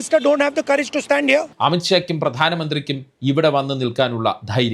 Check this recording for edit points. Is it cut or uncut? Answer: cut